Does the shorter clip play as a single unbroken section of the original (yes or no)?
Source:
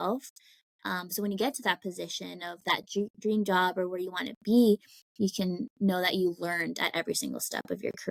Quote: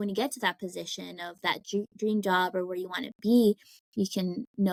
yes